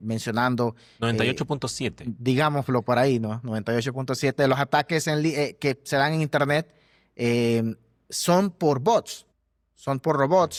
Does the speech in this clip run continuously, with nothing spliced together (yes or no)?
yes